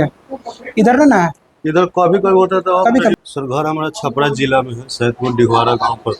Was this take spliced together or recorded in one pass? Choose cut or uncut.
cut